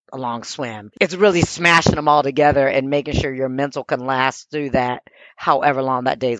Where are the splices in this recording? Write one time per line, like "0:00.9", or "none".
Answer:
none